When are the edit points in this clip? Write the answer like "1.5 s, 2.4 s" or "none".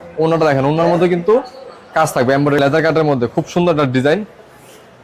2.6 s

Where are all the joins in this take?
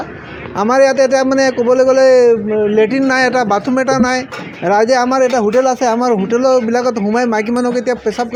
none

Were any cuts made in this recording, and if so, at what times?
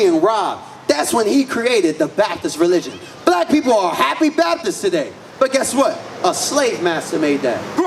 none

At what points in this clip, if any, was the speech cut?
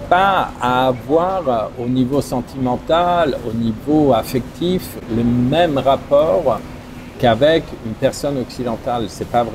none

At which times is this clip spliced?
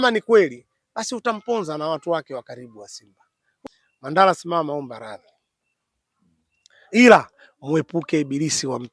3.5 s

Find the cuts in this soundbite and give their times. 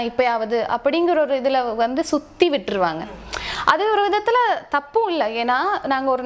none

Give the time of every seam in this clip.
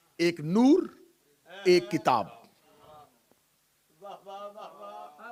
none

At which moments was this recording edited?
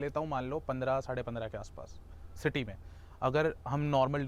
none

